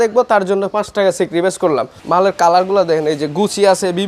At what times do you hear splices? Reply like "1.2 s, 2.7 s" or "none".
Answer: 1.9 s